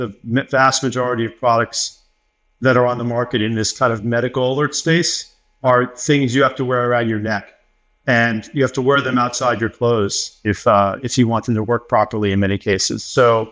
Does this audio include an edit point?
no; 0 cuts

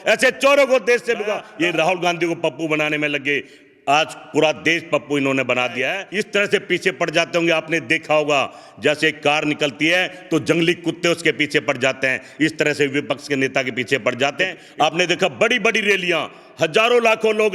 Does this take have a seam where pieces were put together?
yes; 3 cuts; at 1.4 s, 6.0 s, 14.6 s

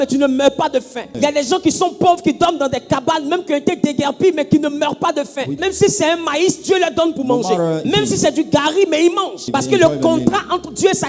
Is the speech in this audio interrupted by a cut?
yes; 4 cuts; at 1.1 s, 5.6 s, 7.8 s, 9.5 s

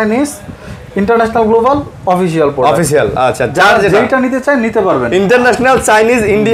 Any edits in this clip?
no; 0 cuts

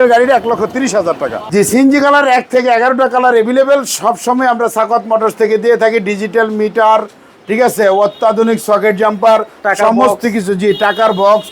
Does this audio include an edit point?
yes; 1 cut; at 1.8 s

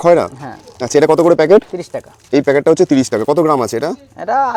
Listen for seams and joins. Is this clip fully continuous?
yes; 0 cuts

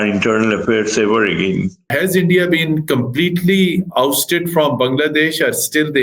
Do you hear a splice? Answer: yes; 1 cut; at 1.9 s

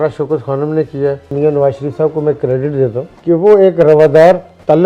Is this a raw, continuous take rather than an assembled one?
no; 1 cut; at 1.3 s

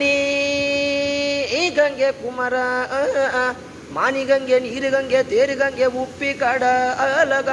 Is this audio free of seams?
yes; 0 cuts

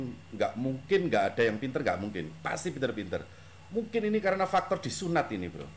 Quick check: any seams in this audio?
no; 0 cuts

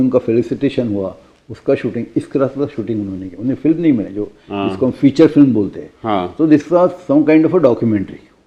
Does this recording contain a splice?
no; 0 cuts

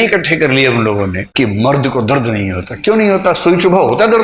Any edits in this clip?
no; 0 cuts

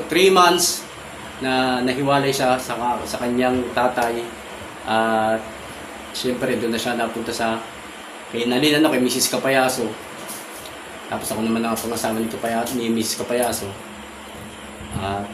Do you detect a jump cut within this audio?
no; 0 cuts

